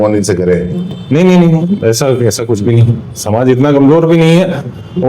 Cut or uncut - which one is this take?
uncut